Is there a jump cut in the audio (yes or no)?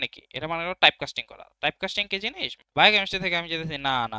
yes